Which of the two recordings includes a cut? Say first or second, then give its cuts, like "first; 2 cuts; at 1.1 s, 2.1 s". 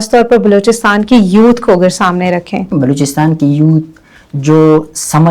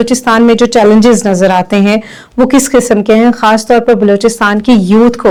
first; 1 cut; at 2.7 s